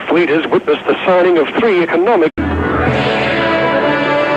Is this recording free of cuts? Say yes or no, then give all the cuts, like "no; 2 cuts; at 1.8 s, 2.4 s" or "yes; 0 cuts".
yes; 0 cuts